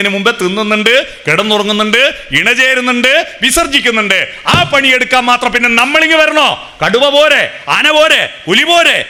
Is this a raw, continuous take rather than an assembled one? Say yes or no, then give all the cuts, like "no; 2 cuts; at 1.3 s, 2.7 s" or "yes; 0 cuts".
yes; 0 cuts